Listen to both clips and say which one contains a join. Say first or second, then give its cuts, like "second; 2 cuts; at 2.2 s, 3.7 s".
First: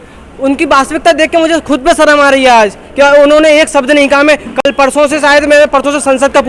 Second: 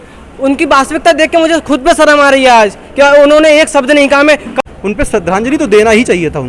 second; 1 cut; at 4.6 s